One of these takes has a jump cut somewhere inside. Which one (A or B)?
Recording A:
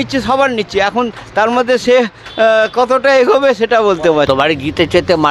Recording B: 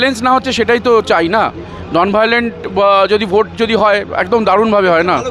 A